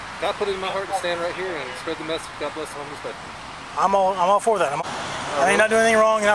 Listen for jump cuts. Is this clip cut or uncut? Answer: cut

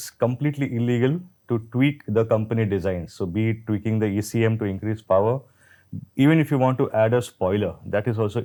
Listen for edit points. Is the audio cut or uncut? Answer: uncut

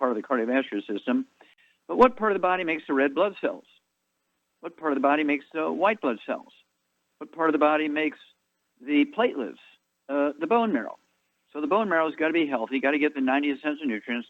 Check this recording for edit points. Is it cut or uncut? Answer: cut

